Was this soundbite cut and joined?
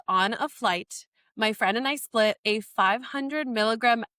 no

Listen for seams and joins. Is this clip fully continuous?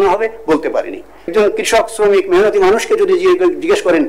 no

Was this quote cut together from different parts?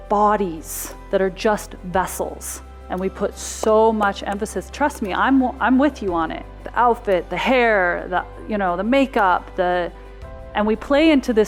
no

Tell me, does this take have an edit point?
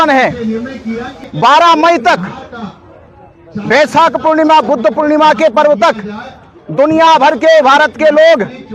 yes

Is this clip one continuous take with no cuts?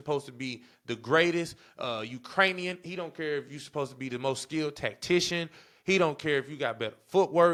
yes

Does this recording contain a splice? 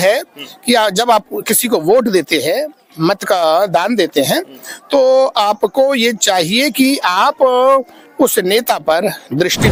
no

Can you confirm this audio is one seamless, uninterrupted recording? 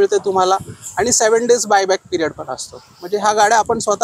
yes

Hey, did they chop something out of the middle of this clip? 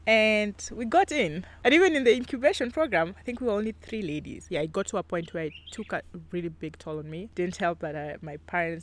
yes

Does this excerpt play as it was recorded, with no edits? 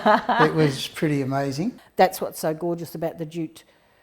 no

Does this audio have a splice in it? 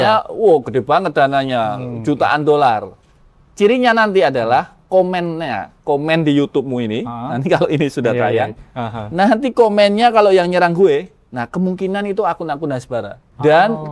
no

